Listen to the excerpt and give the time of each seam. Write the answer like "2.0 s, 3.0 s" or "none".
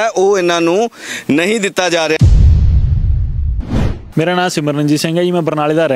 2.2 s, 4.0 s